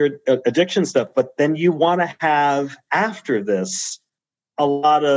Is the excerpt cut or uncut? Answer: uncut